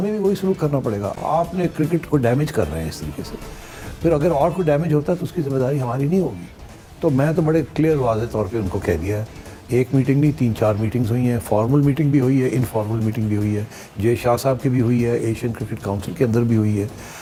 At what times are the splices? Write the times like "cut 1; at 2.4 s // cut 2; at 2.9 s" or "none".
none